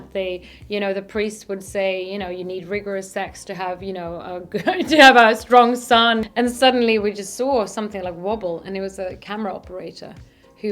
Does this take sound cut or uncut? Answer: cut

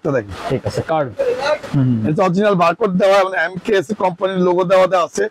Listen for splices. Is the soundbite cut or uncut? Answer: cut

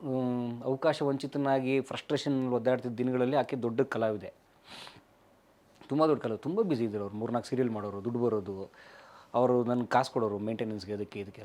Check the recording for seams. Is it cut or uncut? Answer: uncut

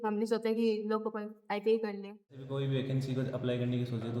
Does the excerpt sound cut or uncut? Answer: cut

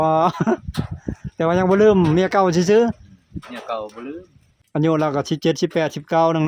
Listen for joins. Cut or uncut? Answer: cut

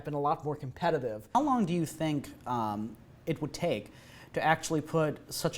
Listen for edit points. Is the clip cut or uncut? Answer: cut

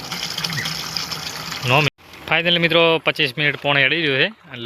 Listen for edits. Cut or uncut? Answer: cut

